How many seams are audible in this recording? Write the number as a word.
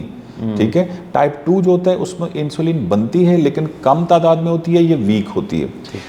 zero